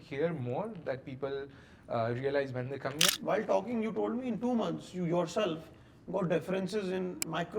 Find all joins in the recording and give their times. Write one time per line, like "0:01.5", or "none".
0:03.1